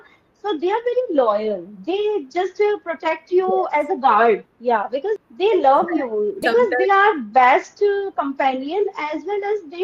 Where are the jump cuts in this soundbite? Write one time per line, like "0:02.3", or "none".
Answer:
0:05.2
0:06.4